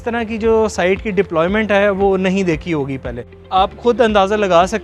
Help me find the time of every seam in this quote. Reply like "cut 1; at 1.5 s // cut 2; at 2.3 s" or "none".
cut 1; at 3.3 s